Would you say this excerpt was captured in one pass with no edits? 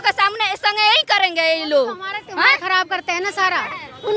yes; 0 cuts

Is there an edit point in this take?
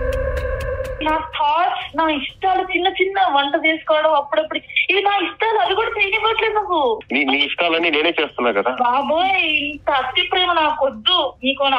yes; 2 cuts; at 1.0 s, 7.0 s

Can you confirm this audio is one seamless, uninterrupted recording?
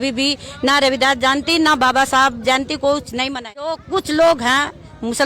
no; 1 cut; at 3.8 s

